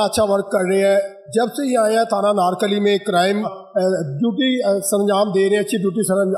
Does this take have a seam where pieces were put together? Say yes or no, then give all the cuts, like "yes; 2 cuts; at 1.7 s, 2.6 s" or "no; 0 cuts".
yes; 1 cut; at 3.5 s